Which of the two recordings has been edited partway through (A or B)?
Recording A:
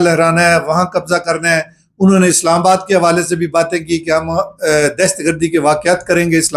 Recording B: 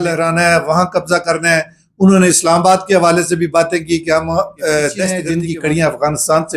B